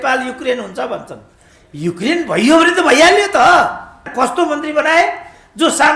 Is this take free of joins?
no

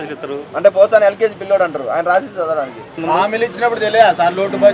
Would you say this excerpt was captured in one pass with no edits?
no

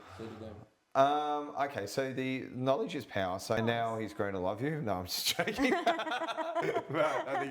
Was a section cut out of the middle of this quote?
yes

